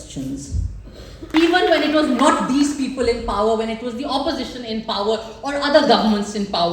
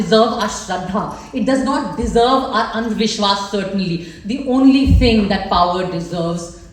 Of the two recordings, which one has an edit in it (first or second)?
first